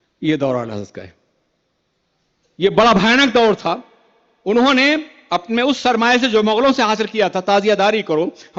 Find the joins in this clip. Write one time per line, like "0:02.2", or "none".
none